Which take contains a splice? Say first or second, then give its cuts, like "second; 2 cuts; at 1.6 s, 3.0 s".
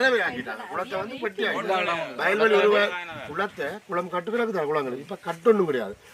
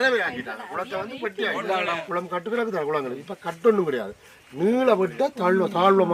second; 1 cut; at 2.0 s